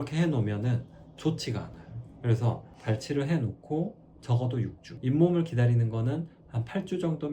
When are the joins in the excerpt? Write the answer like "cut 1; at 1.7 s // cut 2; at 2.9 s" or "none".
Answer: cut 1; at 2.7 s